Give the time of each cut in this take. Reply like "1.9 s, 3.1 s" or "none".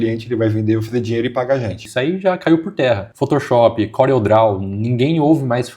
1.8 s, 3.1 s